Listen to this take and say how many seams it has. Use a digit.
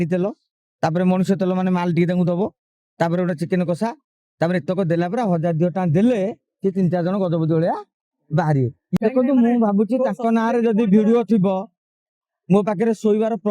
1